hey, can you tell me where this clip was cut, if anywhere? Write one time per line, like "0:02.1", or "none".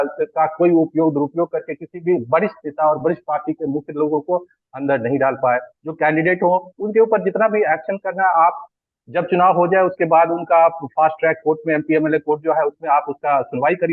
none